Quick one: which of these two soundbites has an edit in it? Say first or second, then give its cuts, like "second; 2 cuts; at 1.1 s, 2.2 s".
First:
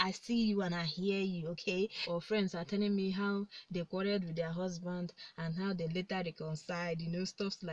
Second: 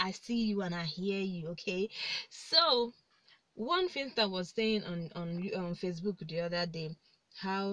first; 1 cut; at 2.0 s